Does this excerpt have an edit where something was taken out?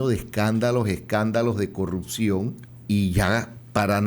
yes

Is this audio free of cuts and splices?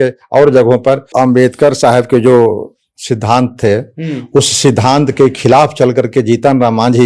no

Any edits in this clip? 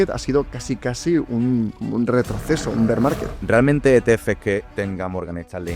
yes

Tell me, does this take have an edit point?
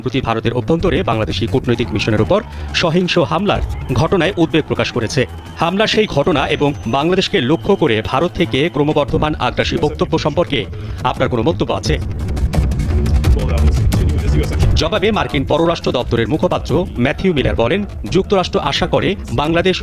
no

